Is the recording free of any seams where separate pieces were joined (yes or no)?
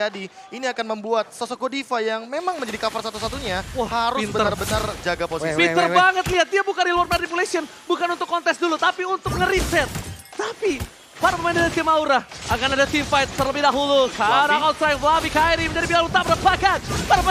yes